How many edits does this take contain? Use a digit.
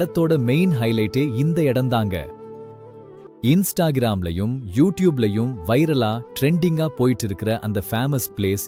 0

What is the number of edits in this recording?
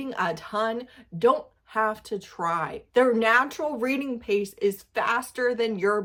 0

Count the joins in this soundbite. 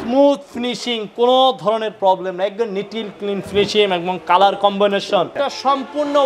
1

